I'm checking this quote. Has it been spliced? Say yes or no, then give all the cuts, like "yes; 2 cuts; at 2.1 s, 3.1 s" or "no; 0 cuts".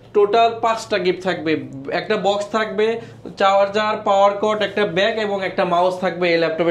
no; 0 cuts